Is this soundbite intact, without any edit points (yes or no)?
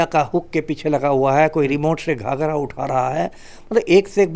yes